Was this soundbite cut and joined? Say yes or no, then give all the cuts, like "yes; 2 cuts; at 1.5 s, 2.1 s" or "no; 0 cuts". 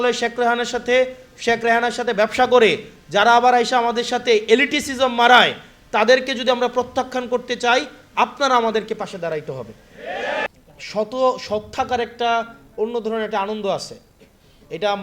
yes; 1 cut; at 10.5 s